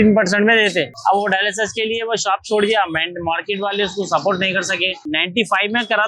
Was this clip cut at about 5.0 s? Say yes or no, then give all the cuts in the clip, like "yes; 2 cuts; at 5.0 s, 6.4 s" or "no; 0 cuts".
yes; 2 cuts; at 0.9 s, 5.0 s